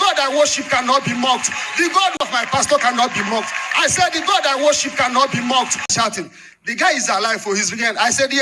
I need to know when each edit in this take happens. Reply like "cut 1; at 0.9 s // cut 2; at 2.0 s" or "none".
cut 1; at 2.3 s // cut 2; at 5.9 s